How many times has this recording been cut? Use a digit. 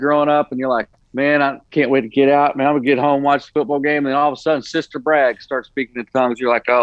2